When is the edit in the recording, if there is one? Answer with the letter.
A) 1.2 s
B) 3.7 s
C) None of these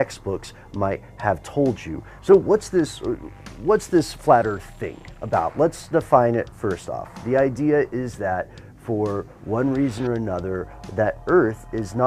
B